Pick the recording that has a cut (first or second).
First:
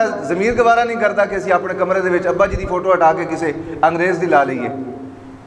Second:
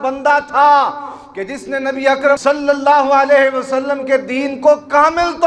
second